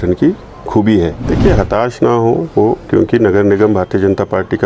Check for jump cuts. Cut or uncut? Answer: cut